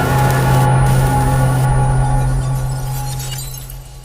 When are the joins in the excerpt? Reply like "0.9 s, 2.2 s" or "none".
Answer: none